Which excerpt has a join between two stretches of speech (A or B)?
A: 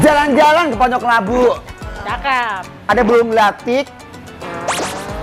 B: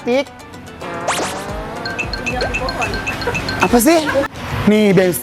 B